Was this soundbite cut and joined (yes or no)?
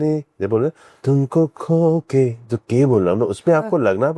no